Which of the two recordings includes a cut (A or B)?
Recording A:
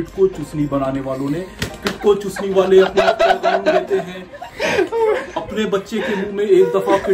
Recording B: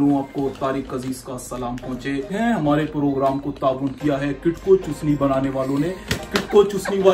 B